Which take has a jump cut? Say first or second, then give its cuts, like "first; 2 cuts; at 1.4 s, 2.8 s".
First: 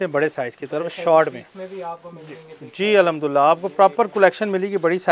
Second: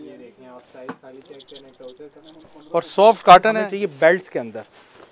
second; 1 cut; at 3.6 s